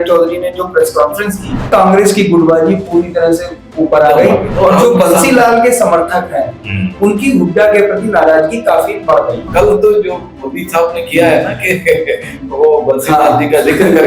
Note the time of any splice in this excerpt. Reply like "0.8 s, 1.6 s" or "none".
1.7 s, 9.5 s